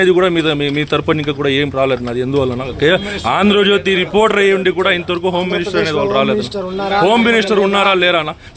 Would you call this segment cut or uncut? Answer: uncut